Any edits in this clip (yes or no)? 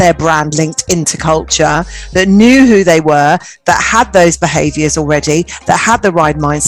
no